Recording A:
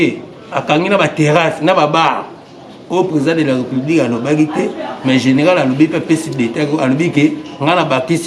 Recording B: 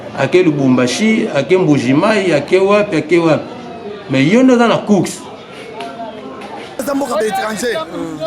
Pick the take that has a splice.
B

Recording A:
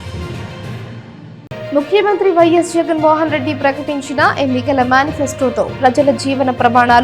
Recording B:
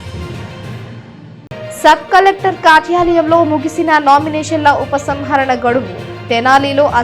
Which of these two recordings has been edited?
A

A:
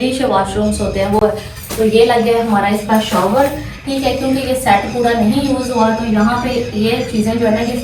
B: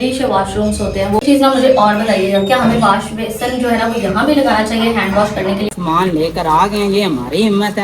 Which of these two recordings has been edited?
B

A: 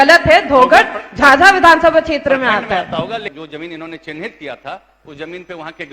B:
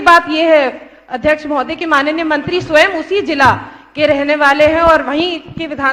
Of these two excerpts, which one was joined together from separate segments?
A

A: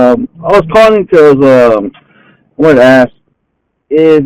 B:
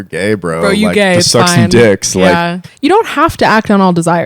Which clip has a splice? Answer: B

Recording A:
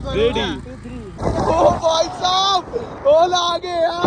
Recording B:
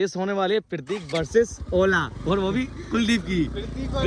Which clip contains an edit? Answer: A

